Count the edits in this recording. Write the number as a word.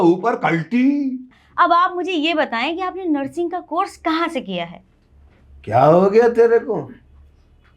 one